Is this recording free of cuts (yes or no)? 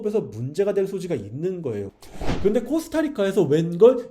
no